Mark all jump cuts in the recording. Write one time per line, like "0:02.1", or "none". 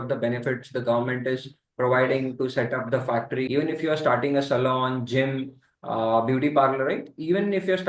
0:03.4